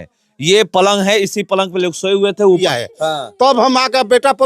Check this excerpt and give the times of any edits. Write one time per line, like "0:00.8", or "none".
0:02.6